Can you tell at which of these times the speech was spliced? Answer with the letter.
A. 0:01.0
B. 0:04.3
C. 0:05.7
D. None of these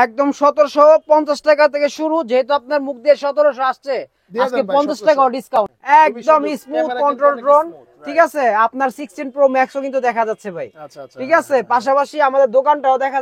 C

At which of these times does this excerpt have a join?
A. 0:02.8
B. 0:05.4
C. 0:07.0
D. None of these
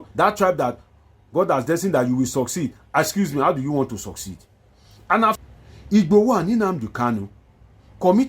B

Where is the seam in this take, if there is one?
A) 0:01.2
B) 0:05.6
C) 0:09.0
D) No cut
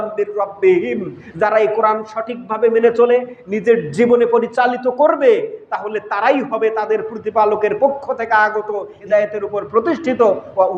C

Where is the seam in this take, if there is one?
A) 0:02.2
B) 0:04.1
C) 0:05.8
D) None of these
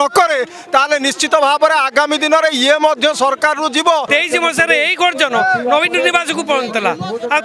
B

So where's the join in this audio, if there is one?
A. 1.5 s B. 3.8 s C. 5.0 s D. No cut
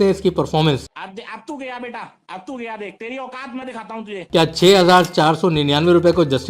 D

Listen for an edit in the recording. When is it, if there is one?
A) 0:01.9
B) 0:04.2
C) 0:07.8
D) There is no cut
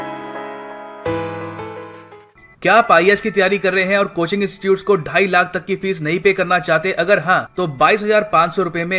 A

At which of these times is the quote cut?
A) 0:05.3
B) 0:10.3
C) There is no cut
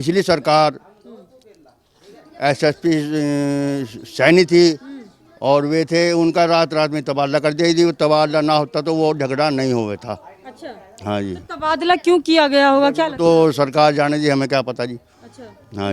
C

